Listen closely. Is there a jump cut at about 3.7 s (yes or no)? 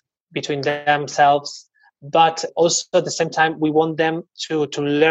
no